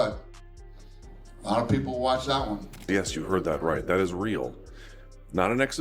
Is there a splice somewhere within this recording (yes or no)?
yes